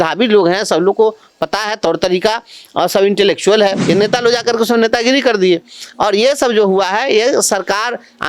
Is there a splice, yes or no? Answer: yes